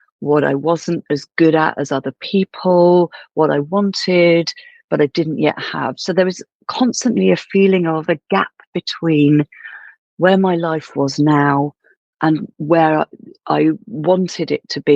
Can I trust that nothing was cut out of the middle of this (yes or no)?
yes